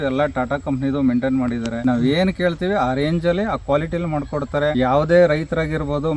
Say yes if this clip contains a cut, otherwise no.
yes